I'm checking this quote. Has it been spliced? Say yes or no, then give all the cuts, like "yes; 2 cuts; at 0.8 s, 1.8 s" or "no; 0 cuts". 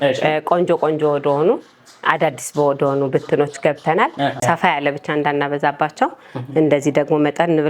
yes; 1 cut; at 4.4 s